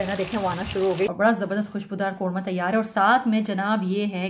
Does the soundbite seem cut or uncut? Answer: cut